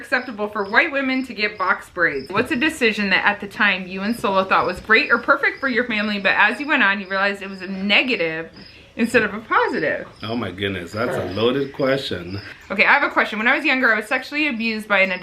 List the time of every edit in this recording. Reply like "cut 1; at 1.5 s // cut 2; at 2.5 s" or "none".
cut 1; at 2.3 s // cut 2; at 12.5 s

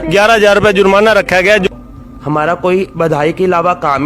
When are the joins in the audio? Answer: cut 1; at 1.7 s

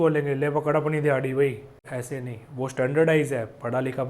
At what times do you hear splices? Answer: cut 1; at 1.8 s

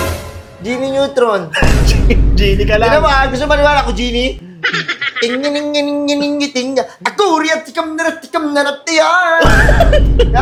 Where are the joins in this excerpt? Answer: none

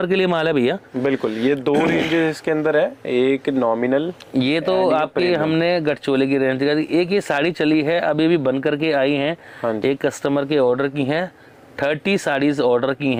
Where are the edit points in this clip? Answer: none

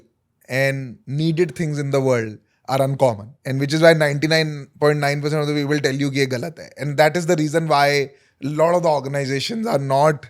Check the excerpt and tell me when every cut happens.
cut 1; at 3.3 s

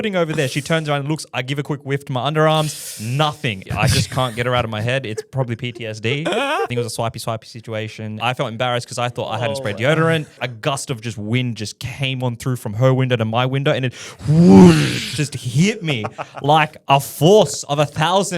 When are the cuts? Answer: cut 1; at 3.6 s // cut 2; at 6.7 s // cut 3; at 8.2 s // cut 4; at 10.5 s

